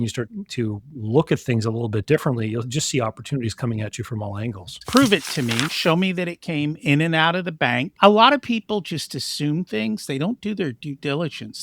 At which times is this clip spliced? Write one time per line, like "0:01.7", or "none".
0:04.8
0:07.9